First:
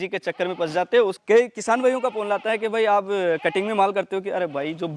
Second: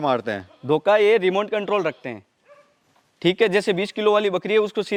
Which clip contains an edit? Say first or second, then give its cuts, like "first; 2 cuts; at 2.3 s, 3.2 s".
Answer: first; 1 cut; at 1.2 s